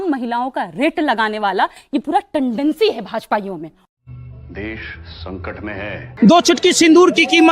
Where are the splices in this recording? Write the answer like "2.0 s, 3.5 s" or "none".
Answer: 6.1 s